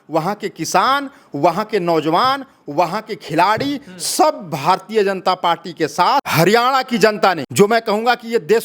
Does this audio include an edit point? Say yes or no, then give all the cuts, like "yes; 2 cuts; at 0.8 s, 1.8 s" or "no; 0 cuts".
yes; 2 cuts; at 6.3 s, 7.4 s